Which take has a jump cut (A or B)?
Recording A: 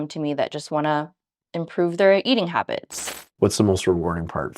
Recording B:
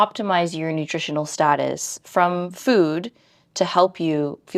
A